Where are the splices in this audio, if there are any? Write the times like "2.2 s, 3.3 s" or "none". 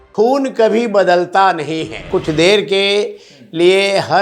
2.1 s